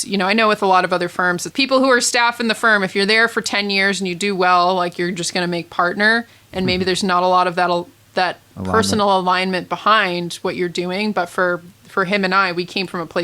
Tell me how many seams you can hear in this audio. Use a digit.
1